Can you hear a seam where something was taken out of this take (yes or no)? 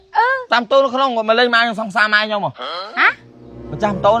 no